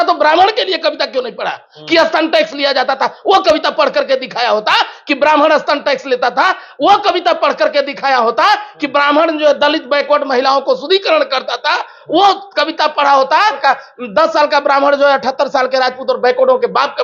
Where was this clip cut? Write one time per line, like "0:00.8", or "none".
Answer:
0:13.6